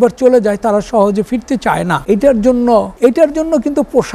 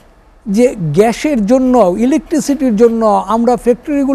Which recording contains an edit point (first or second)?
first